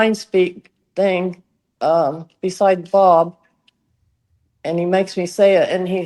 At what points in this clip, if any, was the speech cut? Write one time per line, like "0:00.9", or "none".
none